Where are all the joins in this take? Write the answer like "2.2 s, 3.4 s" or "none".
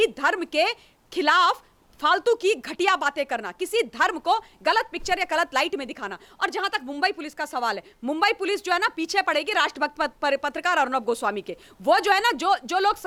none